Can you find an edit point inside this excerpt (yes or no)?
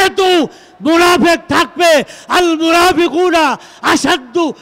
no